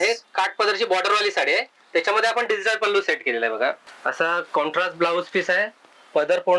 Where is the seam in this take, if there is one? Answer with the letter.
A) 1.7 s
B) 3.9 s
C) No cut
B